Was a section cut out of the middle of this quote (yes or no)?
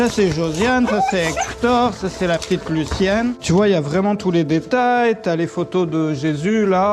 yes